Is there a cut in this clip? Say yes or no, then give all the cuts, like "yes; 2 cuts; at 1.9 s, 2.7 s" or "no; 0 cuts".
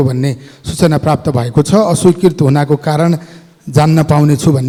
no; 0 cuts